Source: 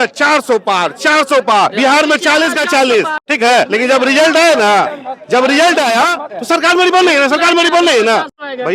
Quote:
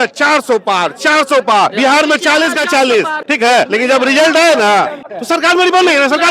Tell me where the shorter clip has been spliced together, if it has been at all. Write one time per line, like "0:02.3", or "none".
0:05.1